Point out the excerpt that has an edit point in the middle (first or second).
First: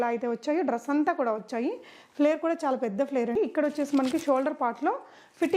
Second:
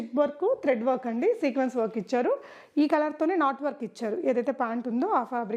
first